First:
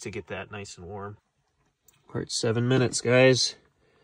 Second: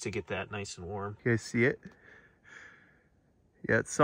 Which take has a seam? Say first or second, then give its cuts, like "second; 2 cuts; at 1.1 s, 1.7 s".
second; 1 cut; at 1.1 s